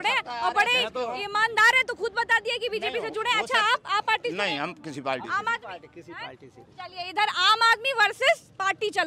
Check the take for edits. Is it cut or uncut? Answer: uncut